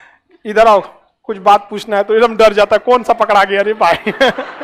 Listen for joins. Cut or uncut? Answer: uncut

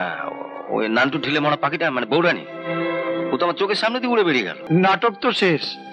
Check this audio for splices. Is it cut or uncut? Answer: cut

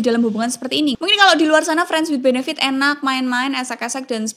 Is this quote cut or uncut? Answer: cut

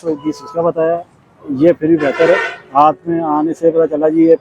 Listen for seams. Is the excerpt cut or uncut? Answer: uncut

